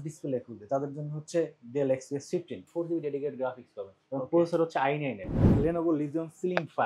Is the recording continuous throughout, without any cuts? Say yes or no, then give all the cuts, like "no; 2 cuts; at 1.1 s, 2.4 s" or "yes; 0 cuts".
no; 2 cuts; at 2.6 s, 5.4 s